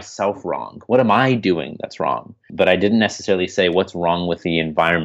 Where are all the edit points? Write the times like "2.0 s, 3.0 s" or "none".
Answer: 2.5 s